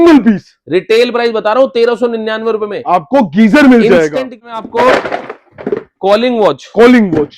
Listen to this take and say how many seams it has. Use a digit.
1